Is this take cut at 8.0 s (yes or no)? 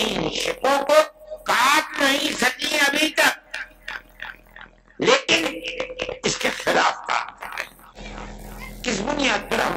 no